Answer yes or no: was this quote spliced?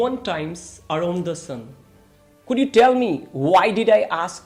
no